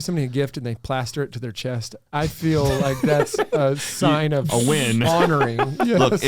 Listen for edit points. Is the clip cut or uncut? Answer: cut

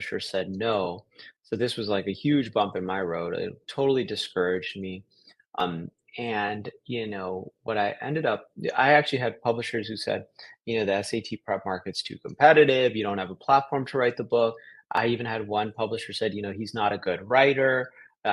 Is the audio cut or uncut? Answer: cut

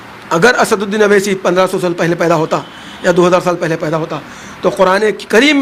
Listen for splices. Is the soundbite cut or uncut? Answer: uncut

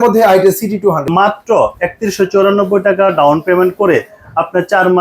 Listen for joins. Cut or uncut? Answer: cut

